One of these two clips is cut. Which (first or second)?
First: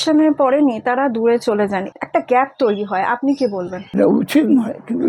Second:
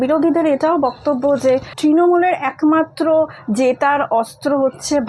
first